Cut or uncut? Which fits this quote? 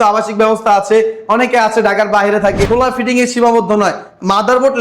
cut